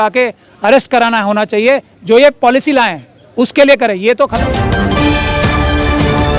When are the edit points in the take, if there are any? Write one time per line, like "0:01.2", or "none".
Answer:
0:04.3